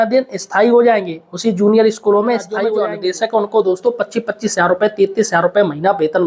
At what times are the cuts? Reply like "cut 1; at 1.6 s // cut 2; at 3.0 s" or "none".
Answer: cut 1; at 2.7 s